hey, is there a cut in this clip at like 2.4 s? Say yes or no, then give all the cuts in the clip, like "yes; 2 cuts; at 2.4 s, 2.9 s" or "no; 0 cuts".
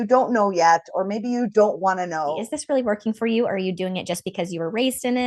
yes; 1 cut; at 2.4 s